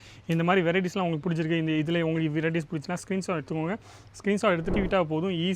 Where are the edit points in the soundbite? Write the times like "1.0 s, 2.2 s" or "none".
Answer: none